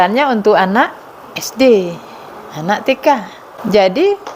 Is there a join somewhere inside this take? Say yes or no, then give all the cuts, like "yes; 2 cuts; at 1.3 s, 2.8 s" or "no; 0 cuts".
yes; 1 cut; at 3.5 s